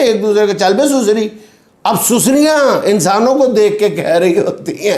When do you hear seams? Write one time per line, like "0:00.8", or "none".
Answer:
none